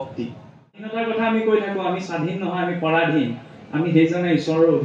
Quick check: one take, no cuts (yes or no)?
no